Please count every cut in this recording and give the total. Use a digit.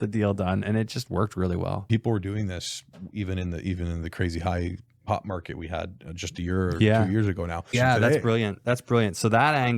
2